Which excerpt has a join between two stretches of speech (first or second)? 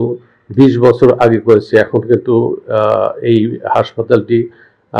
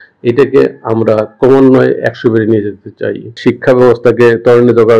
second